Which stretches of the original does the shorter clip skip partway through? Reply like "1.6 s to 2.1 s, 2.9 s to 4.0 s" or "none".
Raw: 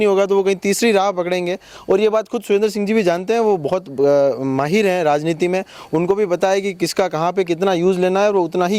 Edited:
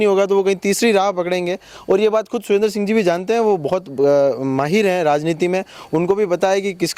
none